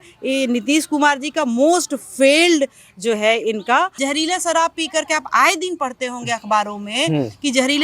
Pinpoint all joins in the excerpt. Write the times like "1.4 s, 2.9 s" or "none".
3.9 s

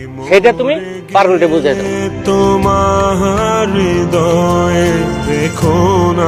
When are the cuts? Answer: none

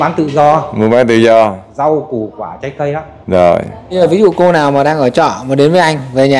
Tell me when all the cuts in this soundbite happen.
3.8 s

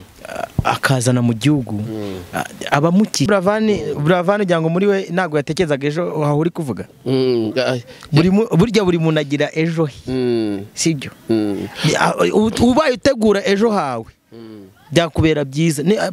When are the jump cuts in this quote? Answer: 3.3 s

